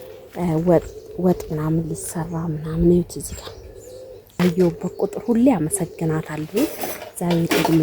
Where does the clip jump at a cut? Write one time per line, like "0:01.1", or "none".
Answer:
0:04.4